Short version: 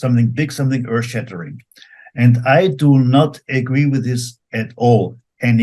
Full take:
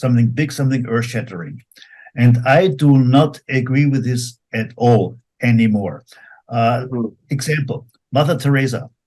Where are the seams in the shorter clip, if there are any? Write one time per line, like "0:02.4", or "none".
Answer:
none